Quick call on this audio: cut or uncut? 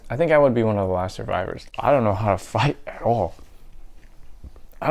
cut